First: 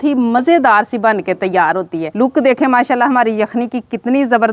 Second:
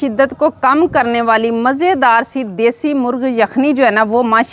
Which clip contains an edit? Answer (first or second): first